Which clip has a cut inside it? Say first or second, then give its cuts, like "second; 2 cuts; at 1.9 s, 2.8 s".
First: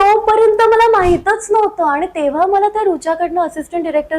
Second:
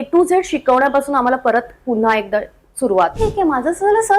second; 1 cut; at 3.1 s